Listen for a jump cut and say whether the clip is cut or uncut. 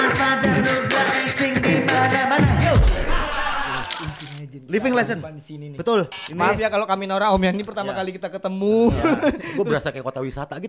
cut